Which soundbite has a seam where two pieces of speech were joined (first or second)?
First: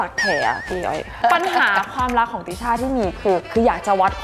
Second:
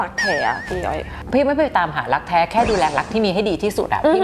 first